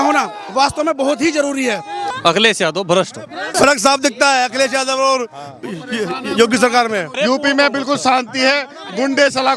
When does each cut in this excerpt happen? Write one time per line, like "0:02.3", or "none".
0:02.1
0:03.5
0:07.1